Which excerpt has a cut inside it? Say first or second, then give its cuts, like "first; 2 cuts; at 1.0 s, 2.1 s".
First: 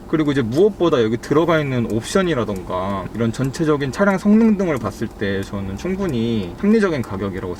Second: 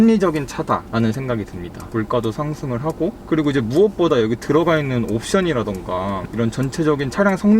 second; 1 cut; at 1.8 s